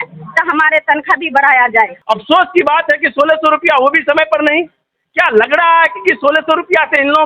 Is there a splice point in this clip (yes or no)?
yes